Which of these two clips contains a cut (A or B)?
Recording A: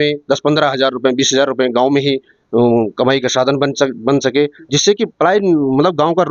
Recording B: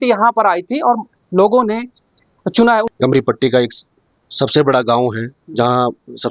B